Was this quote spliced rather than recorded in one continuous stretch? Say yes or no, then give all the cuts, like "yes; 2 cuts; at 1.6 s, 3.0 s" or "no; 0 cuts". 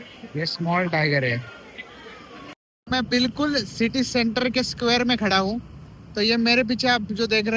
yes; 1 cut; at 2.9 s